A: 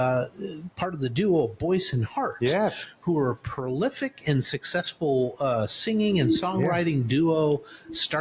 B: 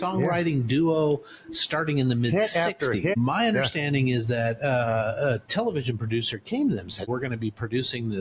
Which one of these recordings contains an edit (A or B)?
B